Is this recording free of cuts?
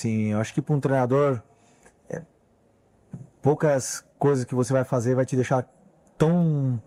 yes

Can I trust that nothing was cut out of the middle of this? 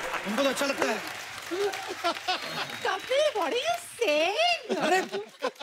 yes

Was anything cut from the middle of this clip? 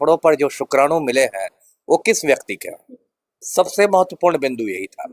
no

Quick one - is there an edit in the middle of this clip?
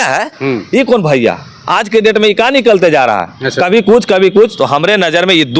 no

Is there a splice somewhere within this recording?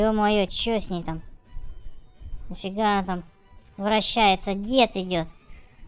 no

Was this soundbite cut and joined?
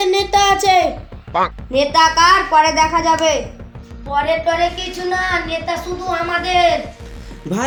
no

